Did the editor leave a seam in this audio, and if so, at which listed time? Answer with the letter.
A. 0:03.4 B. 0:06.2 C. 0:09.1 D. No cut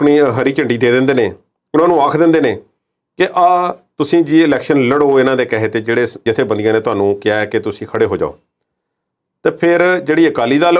B